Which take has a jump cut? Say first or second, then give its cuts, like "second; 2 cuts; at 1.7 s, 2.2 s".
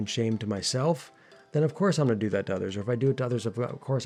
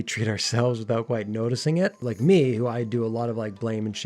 second; 1 cut; at 2.0 s